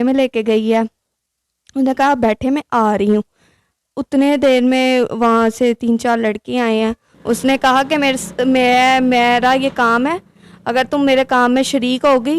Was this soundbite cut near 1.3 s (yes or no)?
no